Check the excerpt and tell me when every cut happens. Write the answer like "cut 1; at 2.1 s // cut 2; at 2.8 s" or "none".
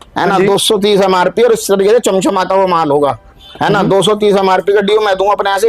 none